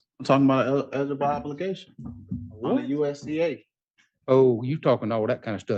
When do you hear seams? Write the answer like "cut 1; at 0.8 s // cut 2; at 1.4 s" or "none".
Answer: none